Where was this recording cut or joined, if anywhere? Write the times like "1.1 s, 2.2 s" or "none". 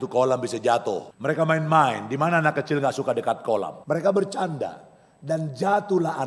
1.1 s, 3.7 s